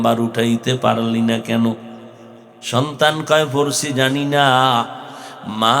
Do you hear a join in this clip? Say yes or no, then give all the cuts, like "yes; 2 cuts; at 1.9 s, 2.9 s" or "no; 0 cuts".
no; 0 cuts